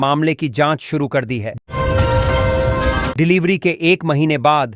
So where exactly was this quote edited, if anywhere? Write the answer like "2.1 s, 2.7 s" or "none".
1.6 s, 3.1 s